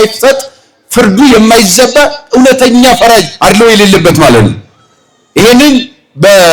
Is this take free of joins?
yes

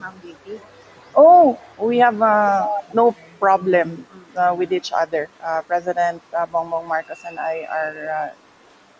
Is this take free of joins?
yes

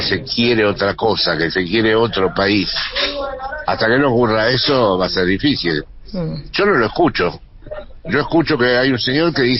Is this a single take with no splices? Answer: yes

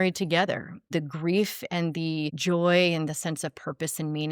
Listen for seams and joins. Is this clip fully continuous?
no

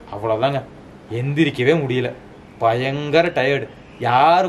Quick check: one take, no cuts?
yes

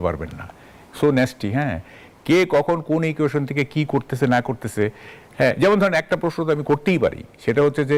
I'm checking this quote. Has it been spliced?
no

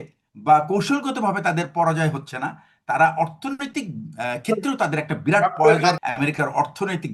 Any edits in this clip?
yes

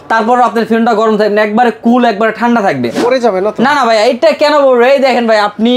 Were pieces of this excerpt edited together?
yes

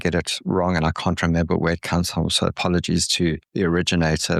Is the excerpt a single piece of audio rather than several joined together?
no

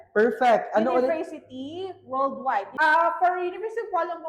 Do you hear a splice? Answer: yes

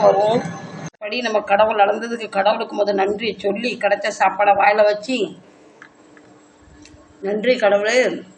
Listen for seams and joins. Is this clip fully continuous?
no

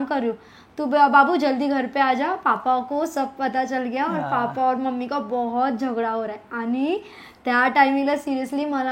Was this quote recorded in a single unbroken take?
yes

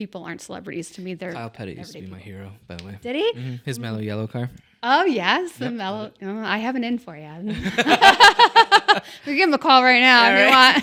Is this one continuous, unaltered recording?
yes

